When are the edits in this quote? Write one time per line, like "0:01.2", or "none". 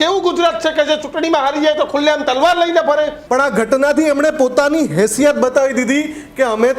0:03.2